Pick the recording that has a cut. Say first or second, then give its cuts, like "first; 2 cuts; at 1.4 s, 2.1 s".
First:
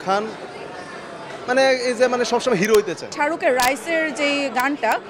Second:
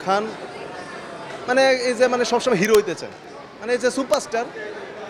first; 1 cut; at 3.0 s